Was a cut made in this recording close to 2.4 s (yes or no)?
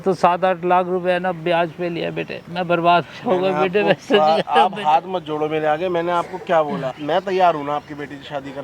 yes